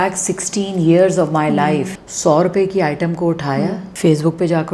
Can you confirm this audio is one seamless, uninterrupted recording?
no; 2 cuts; at 2.0 s, 3.9 s

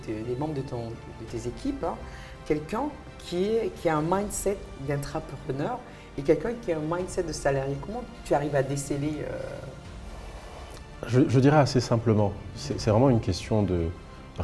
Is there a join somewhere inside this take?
no; 0 cuts

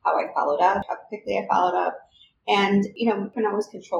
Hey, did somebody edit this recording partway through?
yes; 2 cuts; at 0.9 s, 2.9 s

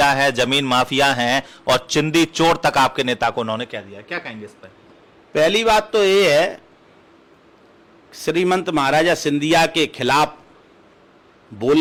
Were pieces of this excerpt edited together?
no; 0 cuts

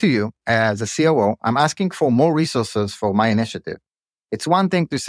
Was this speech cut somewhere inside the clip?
no; 0 cuts

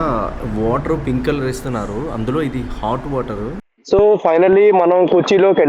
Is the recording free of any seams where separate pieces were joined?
no; 1 cut; at 3.7 s

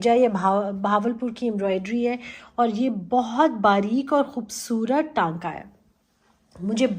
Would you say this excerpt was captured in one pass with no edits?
yes; 0 cuts

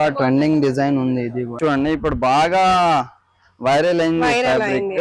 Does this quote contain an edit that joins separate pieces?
yes; 1 cut; at 1.6 s

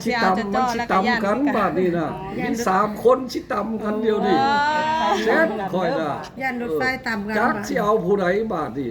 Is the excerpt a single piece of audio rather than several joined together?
yes; 0 cuts

